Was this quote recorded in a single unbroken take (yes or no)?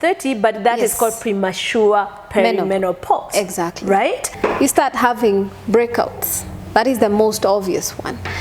no